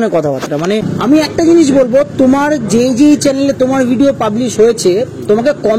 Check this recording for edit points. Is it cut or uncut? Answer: cut